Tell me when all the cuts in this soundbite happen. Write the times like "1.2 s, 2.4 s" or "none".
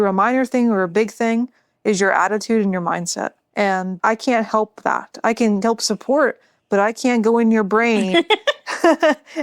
3.4 s